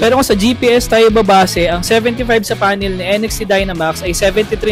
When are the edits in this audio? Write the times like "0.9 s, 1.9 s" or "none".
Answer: none